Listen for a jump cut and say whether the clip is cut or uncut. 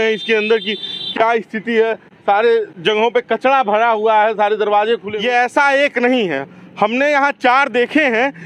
cut